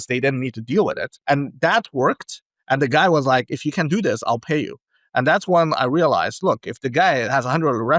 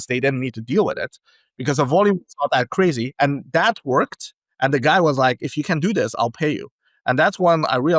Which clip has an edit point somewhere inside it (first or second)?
first